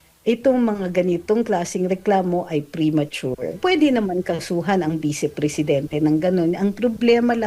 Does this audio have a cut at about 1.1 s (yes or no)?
no